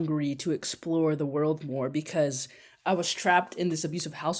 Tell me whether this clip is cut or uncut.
uncut